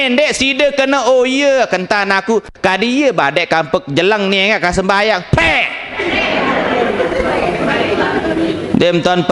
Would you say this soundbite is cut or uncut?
uncut